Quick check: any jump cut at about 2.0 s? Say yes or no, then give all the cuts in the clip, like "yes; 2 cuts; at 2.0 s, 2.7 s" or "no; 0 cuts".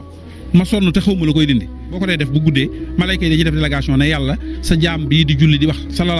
yes; 1 cut; at 2.0 s